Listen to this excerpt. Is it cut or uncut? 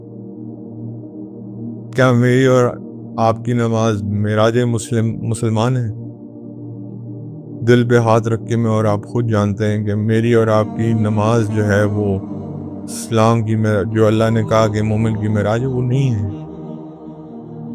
cut